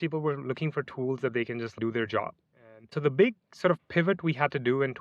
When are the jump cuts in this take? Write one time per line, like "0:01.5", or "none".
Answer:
0:02.9